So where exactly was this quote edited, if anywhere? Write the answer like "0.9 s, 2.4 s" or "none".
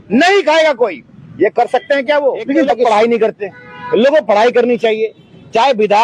2.9 s